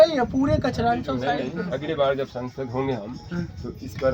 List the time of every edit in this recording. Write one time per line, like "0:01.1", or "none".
0:01.6